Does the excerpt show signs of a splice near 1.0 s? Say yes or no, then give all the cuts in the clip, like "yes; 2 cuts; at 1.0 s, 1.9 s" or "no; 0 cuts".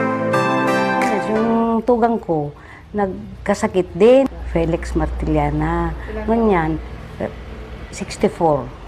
yes; 1 cut; at 1.0 s